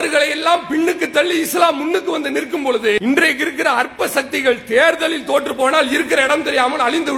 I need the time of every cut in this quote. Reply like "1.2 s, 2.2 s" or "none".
3.0 s